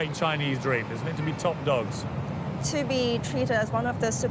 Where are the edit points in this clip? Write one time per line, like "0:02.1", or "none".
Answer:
none